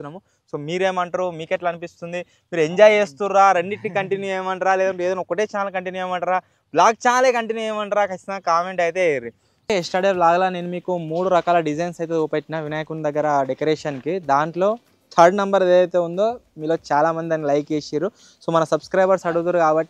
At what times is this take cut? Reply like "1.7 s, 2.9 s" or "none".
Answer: 9.7 s